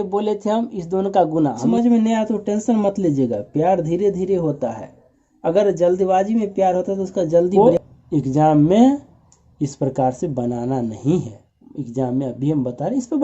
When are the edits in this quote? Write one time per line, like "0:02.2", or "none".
0:01.6
0:07.5

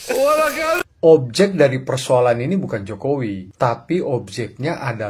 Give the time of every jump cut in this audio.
0:00.9
0:03.5

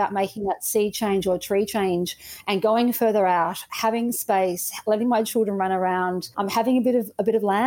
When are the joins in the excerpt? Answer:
none

